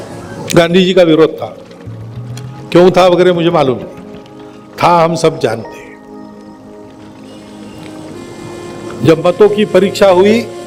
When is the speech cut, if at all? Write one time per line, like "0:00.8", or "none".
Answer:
none